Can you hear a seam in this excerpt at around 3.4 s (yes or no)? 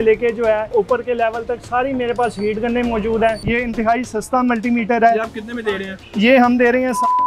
yes